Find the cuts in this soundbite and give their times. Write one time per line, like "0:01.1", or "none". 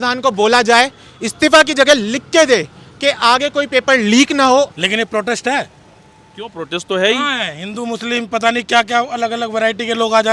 0:04.7